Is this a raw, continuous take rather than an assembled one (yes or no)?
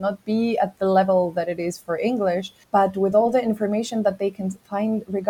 no